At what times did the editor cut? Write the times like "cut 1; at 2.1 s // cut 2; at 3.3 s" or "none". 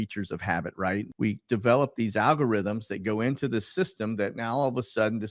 cut 1; at 1.1 s